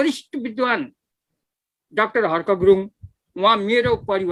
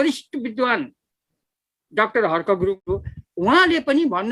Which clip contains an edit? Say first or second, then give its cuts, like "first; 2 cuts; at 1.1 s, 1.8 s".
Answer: second; 1 cut; at 2.8 s